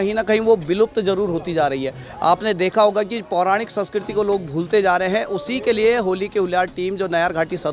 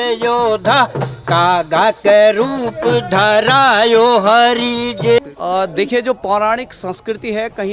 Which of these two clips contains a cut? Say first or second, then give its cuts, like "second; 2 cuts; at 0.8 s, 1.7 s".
second; 1 cut; at 5.2 s